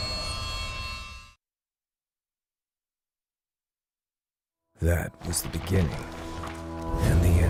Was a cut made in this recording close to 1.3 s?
no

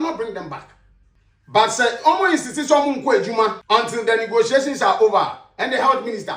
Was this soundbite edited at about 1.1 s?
no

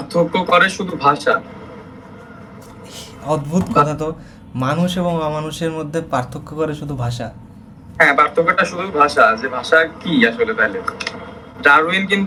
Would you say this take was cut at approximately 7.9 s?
no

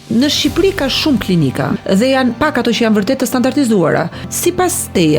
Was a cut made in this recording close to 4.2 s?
yes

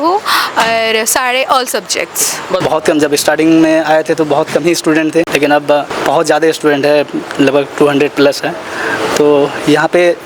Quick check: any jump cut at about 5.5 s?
yes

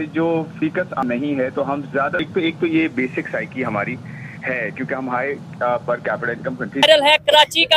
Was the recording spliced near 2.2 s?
yes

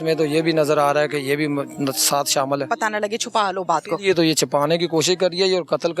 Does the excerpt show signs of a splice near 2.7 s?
yes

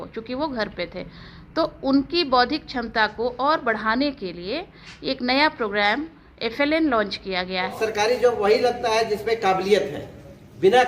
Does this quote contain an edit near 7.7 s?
yes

